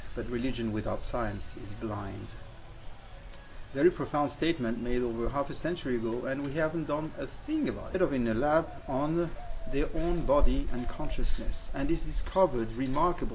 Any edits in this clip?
no; 0 cuts

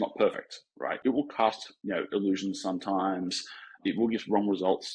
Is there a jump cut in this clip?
yes; 3 cuts; at 1.0 s, 1.7 s, 3.8 s

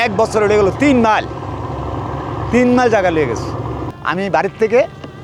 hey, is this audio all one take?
no; 1 cut; at 3.9 s

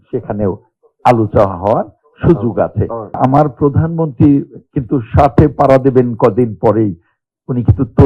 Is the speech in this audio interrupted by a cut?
yes; 1 cut; at 3.2 s

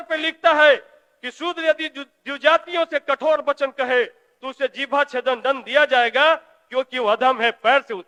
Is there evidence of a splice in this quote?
no; 0 cuts

